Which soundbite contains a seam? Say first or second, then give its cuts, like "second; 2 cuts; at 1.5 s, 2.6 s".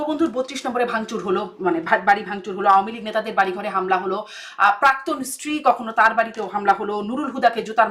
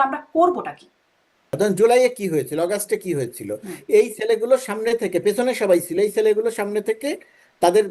second; 1 cut; at 1.5 s